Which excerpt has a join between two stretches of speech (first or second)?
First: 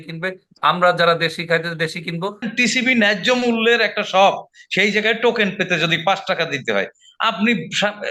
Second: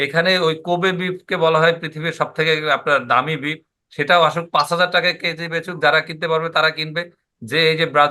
first